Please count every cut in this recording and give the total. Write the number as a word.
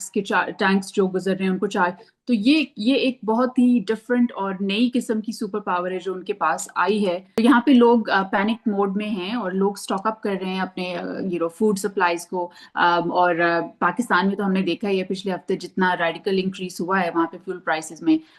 one